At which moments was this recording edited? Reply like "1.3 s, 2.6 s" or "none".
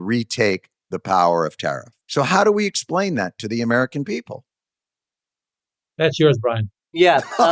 1.9 s